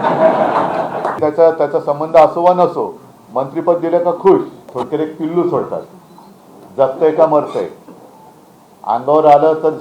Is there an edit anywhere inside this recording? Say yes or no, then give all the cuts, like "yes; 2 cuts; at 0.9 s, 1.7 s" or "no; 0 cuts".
yes; 2 cuts; at 1.2 s, 4.7 s